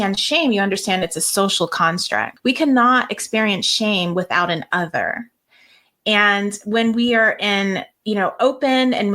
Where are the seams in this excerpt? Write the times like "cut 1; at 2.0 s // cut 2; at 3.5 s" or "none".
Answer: cut 1; at 2.3 s